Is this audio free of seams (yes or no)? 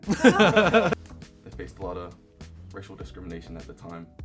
no